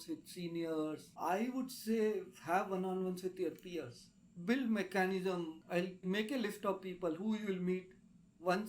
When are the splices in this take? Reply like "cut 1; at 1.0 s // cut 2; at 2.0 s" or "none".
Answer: cut 1; at 1.1 s // cut 2; at 5.6 s